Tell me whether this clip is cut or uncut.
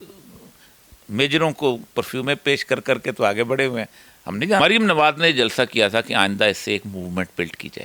cut